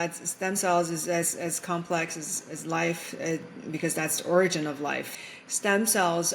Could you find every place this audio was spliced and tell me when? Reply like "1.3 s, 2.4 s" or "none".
5.1 s